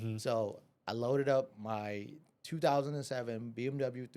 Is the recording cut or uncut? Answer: uncut